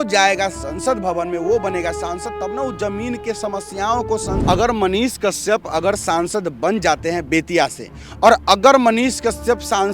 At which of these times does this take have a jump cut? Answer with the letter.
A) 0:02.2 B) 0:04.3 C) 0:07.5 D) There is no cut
B